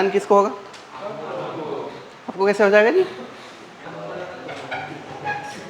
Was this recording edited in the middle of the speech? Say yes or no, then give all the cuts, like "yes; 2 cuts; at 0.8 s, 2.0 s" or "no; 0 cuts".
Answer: yes; 1 cut; at 3.8 s